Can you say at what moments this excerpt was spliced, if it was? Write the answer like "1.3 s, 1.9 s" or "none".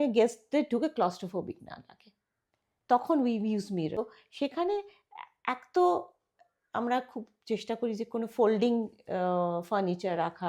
4.0 s

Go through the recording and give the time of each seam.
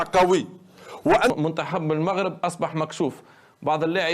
1.3 s

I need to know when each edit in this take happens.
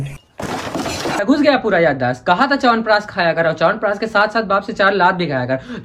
1.2 s

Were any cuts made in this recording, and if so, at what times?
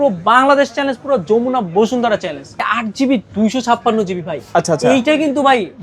2.5 s

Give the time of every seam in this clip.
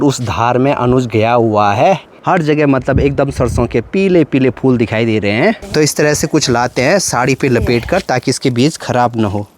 2.1 s, 5.6 s

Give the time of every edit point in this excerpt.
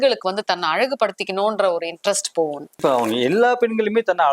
2.7 s

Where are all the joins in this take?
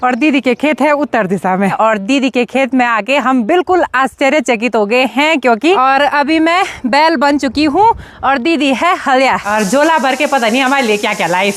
1.7 s, 5.8 s, 9.4 s

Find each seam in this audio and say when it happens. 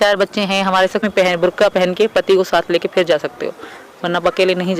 1.0 s

